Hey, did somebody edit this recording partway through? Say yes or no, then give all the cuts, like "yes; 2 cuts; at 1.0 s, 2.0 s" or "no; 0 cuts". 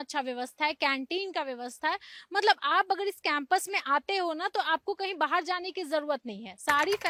no; 0 cuts